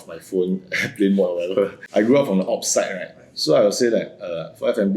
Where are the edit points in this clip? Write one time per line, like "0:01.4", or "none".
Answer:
0:01.8